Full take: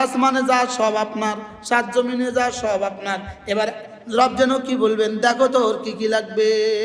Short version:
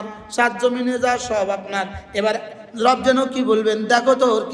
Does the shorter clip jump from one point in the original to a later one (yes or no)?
no